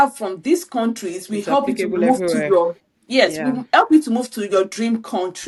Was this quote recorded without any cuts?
yes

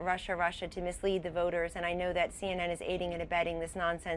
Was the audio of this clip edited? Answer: yes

